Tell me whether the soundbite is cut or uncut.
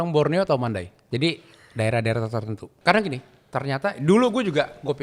cut